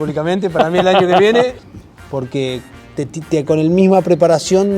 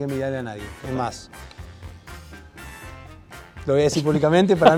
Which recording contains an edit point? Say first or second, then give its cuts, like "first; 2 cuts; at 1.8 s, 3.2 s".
first; 1 cut; at 1.6 s